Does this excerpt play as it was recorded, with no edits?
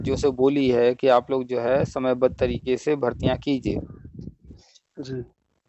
yes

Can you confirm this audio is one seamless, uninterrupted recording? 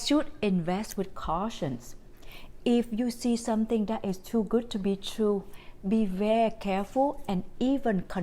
yes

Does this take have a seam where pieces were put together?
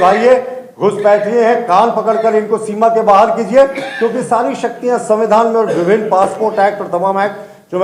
no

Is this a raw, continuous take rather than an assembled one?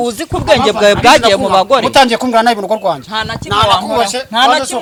yes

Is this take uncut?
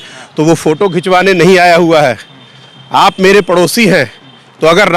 yes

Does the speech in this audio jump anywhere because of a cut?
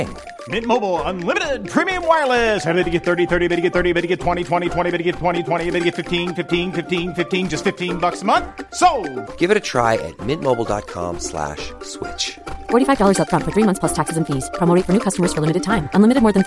no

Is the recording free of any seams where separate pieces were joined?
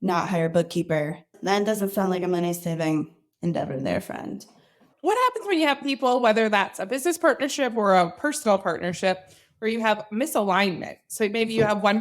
no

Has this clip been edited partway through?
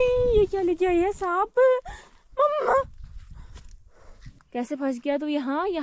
yes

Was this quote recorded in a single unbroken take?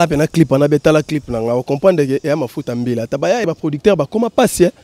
no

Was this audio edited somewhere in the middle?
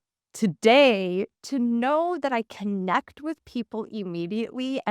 yes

